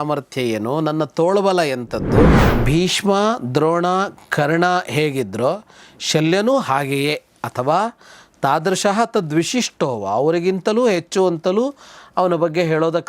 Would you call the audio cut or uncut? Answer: cut